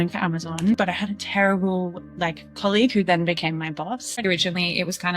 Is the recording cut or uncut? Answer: cut